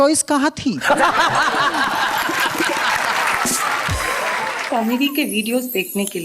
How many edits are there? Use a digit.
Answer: 1